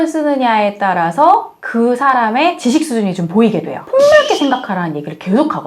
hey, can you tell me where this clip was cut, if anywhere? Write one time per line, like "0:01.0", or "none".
0:03.9